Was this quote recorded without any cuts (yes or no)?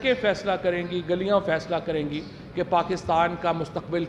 yes